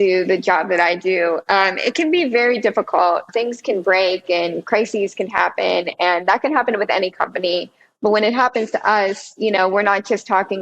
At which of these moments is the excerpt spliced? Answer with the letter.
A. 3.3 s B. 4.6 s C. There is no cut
A